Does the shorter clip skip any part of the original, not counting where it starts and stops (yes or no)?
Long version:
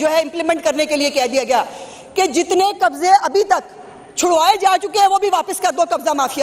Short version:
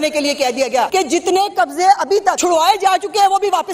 yes